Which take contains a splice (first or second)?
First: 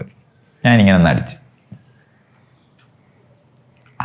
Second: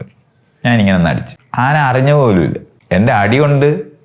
second